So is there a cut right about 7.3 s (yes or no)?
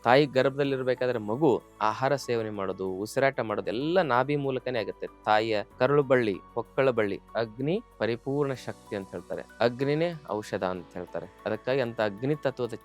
yes